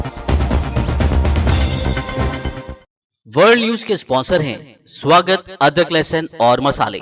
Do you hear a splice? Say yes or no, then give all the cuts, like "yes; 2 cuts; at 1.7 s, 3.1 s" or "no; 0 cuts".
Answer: yes; 1 cut; at 2.8 s